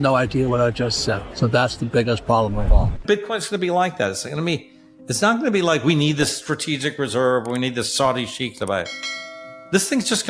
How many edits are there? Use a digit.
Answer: 1